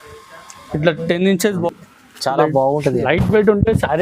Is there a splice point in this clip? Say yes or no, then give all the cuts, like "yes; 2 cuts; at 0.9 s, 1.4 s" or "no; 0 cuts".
yes; 1 cut; at 1.6 s